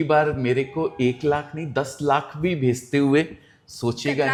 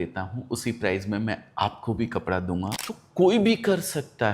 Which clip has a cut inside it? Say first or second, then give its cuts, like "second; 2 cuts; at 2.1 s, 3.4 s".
second; 1 cut; at 2.8 s